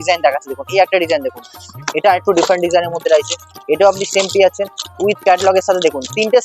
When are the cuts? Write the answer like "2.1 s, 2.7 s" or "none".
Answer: none

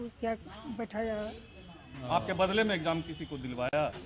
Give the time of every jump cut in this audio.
none

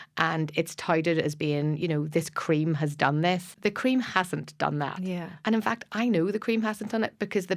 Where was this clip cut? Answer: 3.5 s

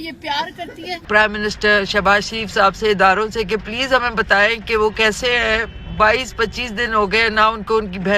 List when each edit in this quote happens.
1.0 s

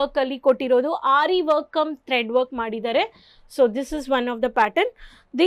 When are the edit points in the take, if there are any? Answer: none

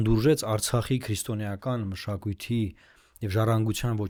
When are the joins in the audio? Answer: none

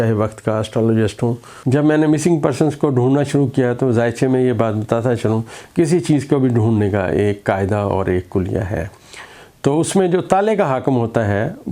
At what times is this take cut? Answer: 1.5 s

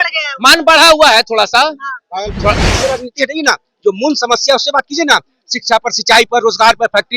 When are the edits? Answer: 2.6 s

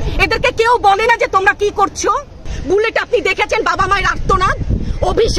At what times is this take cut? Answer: 2.5 s

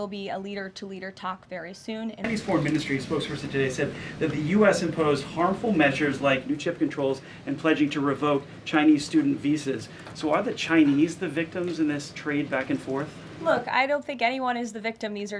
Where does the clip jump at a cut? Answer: 2.3 s

